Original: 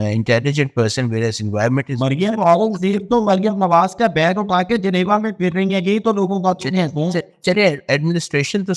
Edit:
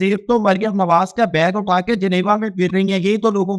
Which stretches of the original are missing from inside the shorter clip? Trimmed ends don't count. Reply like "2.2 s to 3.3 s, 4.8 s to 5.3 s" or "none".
none

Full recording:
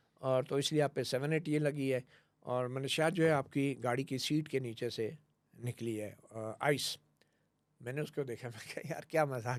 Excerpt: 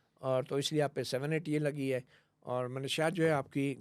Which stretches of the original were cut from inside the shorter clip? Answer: none

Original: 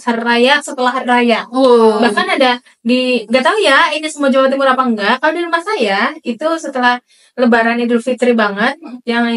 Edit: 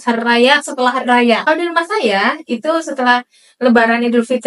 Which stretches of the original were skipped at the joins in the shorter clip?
1.4 s to 5.2 s

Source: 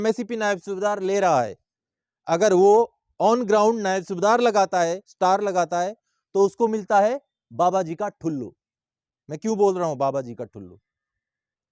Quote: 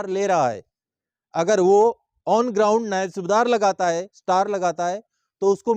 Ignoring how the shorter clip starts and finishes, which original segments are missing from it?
none

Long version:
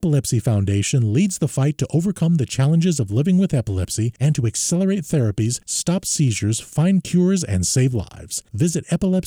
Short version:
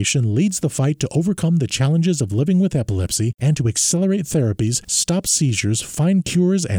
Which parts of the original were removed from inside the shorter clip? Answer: none

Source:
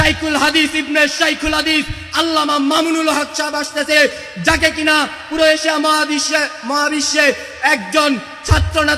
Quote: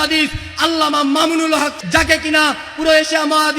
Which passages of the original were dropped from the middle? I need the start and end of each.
3.3 s to 4.3 s

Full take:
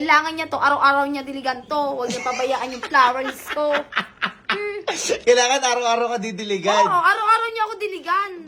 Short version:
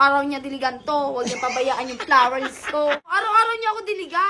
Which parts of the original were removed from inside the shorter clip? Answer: 4.0 s to 7.1 s

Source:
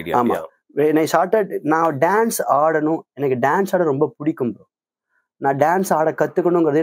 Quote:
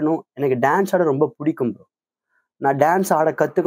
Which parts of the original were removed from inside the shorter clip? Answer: none

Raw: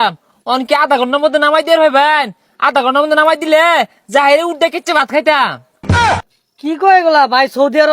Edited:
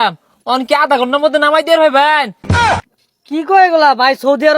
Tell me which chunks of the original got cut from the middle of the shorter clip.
2.8 s to 6.1 s

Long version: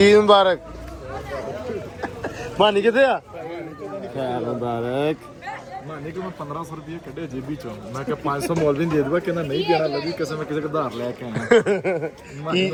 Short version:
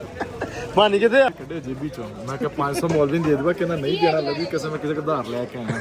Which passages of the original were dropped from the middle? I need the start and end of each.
3.1 s to 6.9 s

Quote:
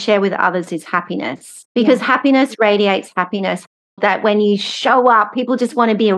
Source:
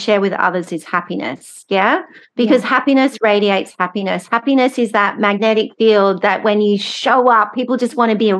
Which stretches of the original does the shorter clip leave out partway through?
1.5 s to 2.2 s, 4.5 s to 6.1 s

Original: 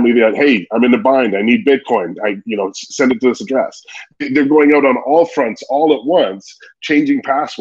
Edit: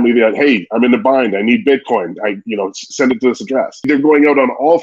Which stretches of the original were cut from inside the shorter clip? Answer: 3.8 s to 4.2 s

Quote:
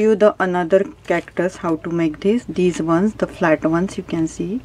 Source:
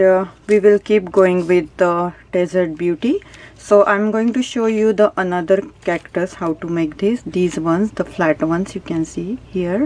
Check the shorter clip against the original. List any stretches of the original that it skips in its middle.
none

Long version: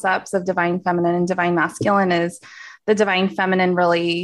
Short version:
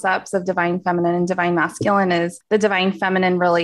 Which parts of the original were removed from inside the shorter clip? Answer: 2.4 s to 2.7 s

